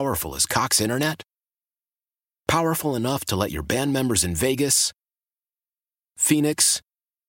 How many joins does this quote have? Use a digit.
0